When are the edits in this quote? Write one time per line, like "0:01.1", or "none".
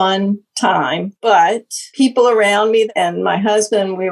0:01.2
0:01.8
0:02.9